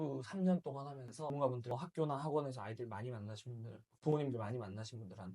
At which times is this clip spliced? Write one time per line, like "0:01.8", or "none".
0:01.3